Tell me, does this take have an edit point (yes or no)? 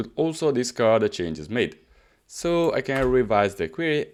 no